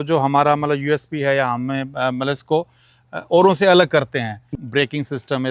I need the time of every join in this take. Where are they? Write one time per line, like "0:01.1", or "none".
0:04.6